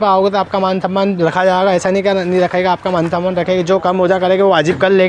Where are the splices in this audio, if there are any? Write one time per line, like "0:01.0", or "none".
none